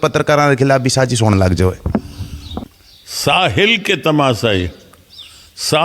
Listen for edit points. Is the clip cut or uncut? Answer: cut